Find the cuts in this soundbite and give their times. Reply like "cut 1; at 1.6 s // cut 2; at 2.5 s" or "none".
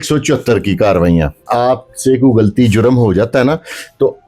cut 1; at 1.5 s